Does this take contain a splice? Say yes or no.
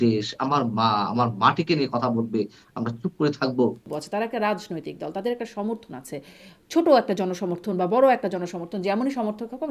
yes